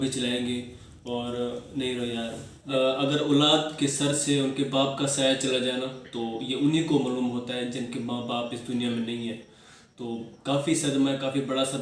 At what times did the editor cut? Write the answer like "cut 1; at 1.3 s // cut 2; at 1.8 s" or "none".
cut 1; at 2.6 s